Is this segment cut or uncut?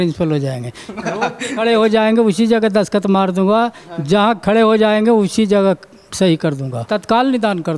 cut